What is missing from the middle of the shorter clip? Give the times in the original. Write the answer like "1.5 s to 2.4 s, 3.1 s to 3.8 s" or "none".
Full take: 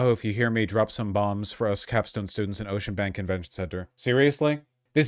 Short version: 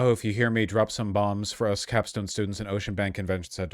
none